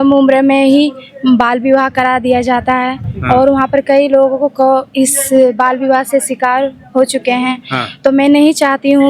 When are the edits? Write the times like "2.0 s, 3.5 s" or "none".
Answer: none